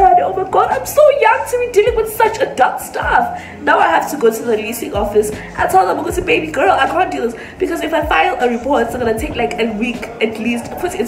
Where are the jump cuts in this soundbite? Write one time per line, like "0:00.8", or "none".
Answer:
none